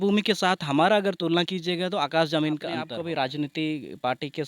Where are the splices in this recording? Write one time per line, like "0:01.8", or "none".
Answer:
0:02.9